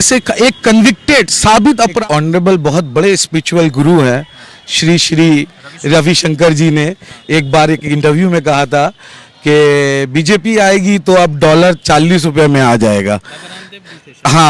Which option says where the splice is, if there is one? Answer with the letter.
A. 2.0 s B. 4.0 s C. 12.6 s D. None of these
A